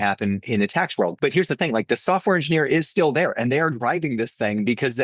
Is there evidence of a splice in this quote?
yes; 1 cut; at 1.1 s

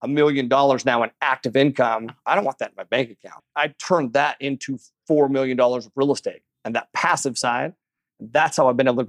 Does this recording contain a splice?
yes; 3 cuts; at 2.2 s, 3.4 s, 6.5 s

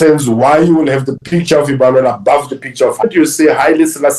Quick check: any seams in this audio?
yes; 1 cut; at 3.0 s

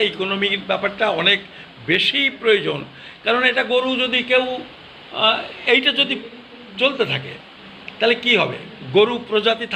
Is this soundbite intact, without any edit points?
yes; 0 cuts

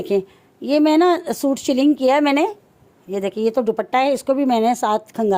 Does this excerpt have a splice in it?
no; 0 cuts

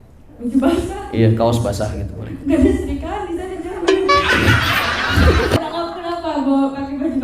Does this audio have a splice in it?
yes; 1 cut; at 5.6 s

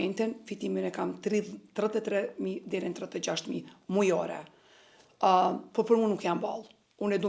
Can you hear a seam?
no; 0 cuts

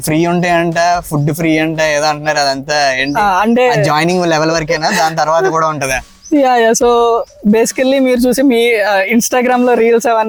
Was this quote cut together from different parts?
no; 0 cuts

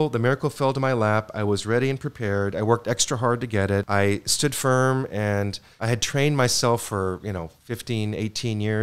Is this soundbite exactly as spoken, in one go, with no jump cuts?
no; 2 cuts; at 3.9 s, 5.7 s

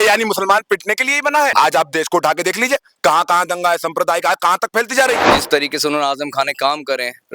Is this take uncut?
no; 2 cuts; at 1.5 s, 5.3 s

